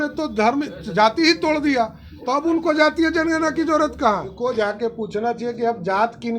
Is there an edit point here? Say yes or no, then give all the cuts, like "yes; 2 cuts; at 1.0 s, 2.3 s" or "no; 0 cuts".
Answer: yes; 1 cut; at 4.3 s